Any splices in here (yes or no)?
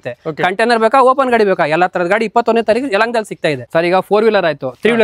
yes